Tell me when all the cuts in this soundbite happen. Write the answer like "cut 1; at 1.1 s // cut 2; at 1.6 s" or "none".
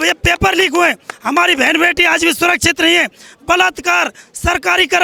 none